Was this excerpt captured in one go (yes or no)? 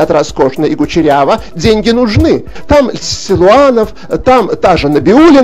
no